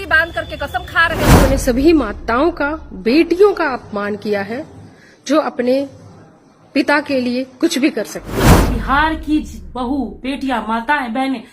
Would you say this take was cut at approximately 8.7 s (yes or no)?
yes